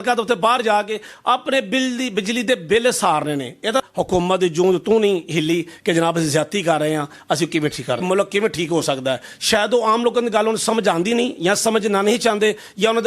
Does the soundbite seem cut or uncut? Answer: cut